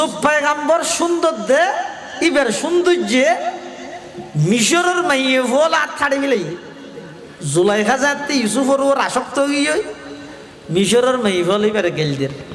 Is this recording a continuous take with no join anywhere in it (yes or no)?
yes